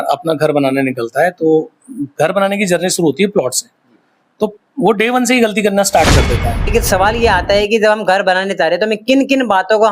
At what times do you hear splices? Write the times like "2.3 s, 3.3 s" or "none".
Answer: 6.6 s